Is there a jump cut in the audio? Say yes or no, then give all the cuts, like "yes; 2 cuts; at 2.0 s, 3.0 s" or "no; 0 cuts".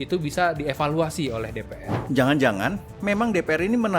yes; 1 cut; at 1.9 s